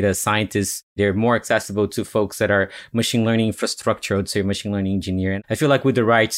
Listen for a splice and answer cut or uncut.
cut